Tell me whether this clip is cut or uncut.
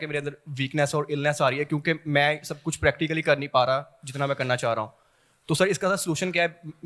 uncut